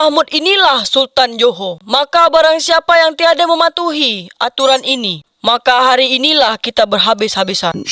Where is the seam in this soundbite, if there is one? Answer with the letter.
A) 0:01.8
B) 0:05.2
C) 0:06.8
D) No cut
A